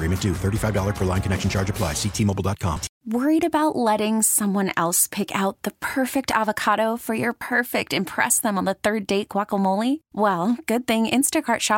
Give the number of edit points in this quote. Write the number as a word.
one